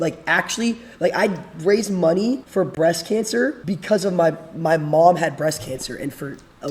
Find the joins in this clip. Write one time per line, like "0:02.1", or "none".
0:02.5
0:03.6